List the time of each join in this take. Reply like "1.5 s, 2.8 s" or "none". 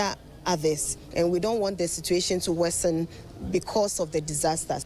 1.0 s